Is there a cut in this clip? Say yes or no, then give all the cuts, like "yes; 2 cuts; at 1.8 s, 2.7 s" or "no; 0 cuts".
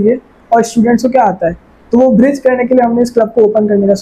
no; 0 cuts